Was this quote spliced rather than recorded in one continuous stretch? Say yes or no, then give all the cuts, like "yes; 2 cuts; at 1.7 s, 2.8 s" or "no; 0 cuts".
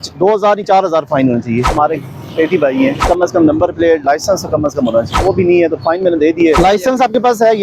yes; 4 cuts; at 1.7 s, 3.1 s, 5.1 s, 6.6 s